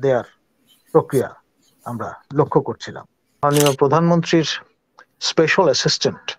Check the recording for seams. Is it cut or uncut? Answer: cut